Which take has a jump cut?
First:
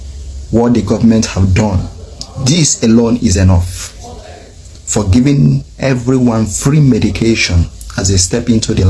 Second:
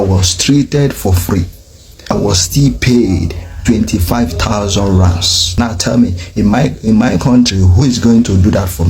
second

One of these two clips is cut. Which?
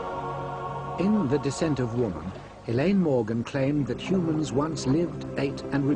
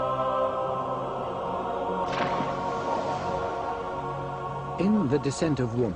second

